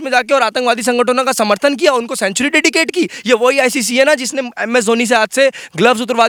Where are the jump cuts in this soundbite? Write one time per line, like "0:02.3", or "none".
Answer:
none